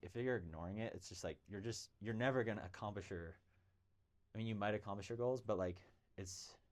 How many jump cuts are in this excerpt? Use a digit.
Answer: 0